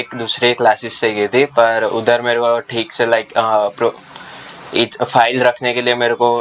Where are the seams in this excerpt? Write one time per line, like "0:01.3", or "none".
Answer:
none